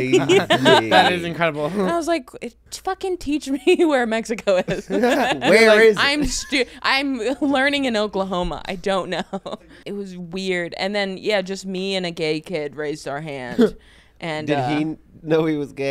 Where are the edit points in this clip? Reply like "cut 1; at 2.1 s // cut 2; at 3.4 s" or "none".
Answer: cut 1; at 1.9 s // cut 2; at 9.5 s